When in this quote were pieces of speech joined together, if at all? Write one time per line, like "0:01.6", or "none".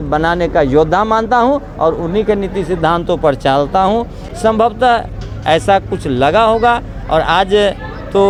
none